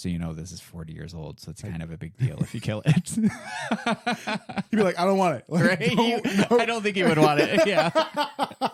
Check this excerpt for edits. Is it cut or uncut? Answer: uncut